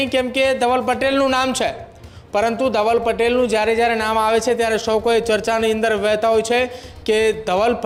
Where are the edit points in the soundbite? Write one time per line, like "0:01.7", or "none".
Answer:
none